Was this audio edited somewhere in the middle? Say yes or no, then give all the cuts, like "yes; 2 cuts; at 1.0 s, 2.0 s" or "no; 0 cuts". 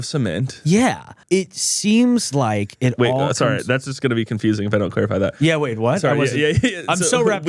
yes; 1 cut; at 1.1 s